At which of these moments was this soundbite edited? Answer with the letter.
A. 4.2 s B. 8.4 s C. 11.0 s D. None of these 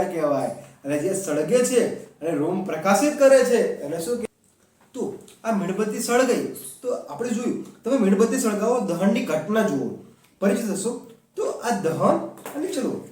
A